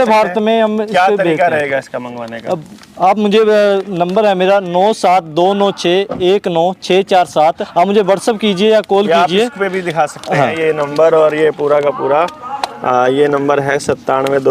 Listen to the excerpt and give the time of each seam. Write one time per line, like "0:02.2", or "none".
0:07.6